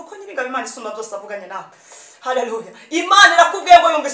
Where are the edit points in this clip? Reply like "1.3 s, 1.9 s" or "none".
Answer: none